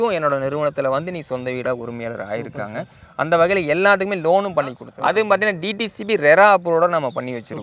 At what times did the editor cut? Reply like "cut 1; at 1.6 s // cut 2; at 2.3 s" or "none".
cut 1; at 4.9 s